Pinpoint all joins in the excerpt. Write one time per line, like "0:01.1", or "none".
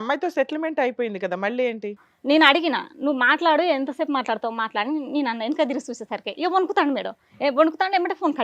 0:02.1